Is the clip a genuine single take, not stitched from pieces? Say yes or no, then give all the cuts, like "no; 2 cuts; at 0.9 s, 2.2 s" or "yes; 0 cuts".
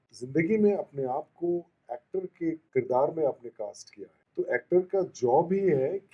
yes; 0 cuts